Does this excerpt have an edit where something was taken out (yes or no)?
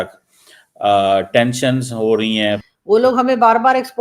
yes